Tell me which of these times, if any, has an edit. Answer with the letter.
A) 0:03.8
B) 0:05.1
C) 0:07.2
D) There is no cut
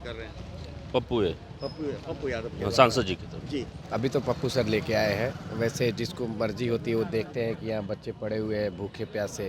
A